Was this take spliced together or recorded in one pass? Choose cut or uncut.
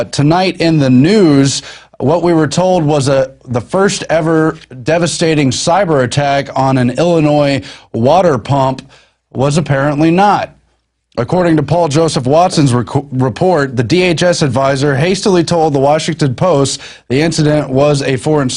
uncut